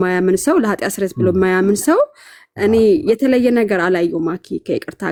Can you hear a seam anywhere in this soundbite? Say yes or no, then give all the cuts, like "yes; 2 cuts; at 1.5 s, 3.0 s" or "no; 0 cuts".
no; 0 cuts